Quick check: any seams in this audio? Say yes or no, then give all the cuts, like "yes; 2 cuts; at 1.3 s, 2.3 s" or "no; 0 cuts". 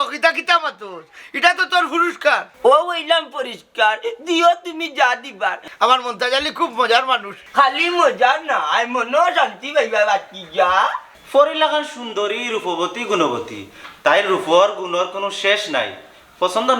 yes; 2 cuts; at 5.6 s, 11.1 s